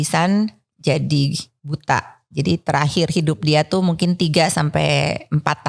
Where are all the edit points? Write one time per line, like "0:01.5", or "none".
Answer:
none